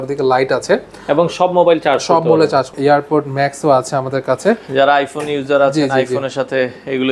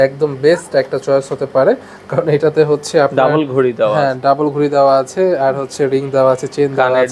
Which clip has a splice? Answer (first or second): first